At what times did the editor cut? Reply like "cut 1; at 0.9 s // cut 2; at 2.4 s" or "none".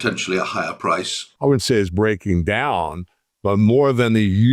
cut 1; at 1.3 s